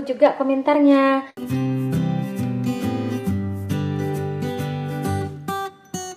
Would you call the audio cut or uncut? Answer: cut